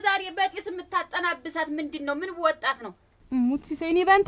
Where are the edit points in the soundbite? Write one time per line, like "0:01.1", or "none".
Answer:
0:03.1